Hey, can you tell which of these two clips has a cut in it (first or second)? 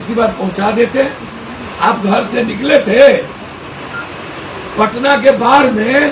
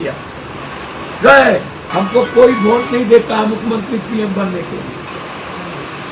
second